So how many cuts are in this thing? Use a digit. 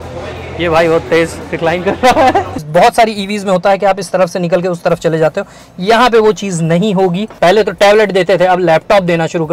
2